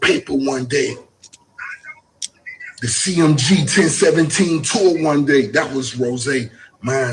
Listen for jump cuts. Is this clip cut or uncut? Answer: uncut